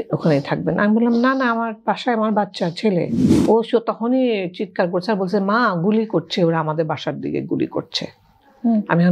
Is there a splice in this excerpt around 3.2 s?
yes; 1 cut; at 3.2 s

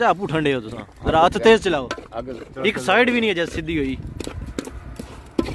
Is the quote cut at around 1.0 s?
no; 1 cut; at 2.5 s

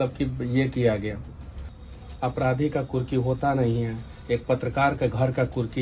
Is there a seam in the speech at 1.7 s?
yes; 1 cut; at 1.7 s

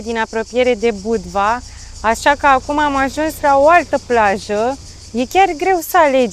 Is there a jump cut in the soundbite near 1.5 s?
no; 0 cuts

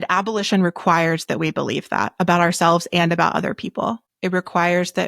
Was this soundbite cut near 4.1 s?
yes; 1 cut; at 4.1 s

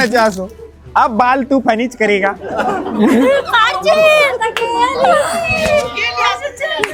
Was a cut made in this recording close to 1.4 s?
no; 0 cuts

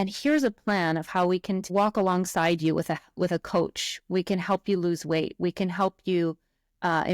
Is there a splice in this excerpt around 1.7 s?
yes; 1 cut; at 1.7 s

